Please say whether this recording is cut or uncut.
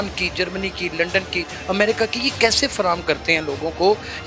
uncut